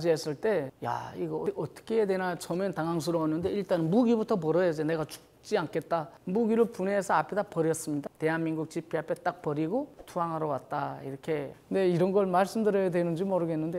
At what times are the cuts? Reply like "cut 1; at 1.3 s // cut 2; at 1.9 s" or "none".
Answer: cut 1; at 6.1 s // cut 2; at 8.1 s // cut 3; at 11.6 s